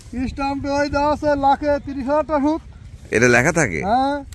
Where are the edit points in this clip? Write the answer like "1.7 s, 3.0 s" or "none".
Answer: none